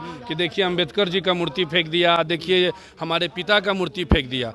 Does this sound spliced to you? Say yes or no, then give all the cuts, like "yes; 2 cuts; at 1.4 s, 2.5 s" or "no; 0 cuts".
no; 0 cuts